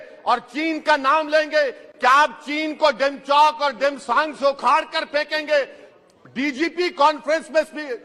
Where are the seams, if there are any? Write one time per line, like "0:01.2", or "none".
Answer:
none